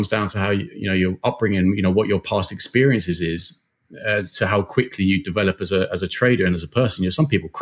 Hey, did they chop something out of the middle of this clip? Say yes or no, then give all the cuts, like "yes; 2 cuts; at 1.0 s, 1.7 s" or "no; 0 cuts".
no; 0 cuts